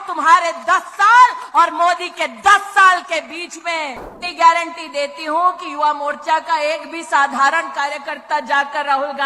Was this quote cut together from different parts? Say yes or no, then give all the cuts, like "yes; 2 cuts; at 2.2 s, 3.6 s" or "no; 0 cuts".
yes; 1 cut; at 4.2 s